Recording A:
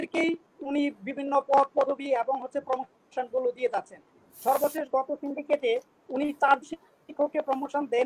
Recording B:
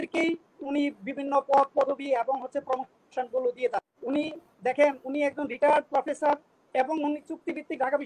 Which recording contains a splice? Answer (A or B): B